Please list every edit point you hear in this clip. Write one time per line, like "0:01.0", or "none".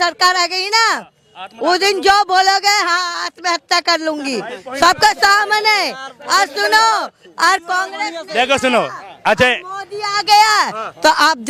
none